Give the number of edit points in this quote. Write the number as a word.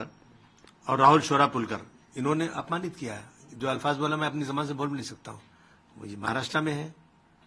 zero